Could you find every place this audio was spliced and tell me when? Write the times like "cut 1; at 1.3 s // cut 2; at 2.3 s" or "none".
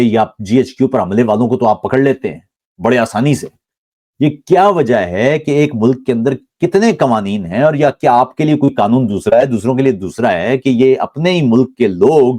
none